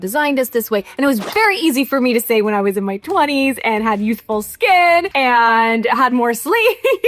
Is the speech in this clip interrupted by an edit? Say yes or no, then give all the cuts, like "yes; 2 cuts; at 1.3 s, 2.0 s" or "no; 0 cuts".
yes; 1 cut; at 5.1 s